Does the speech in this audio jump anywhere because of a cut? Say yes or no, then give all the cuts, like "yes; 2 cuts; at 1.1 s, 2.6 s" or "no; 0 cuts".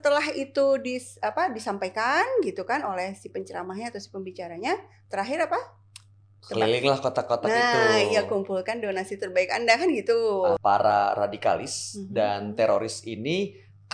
yes; 1 cut; at 10.6 s